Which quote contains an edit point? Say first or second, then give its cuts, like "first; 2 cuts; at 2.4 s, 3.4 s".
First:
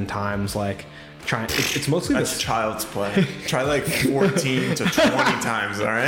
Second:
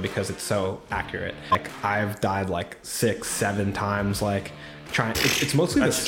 second; 1 cut; at 1.6 s